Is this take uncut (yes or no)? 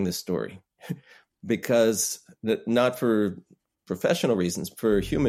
yes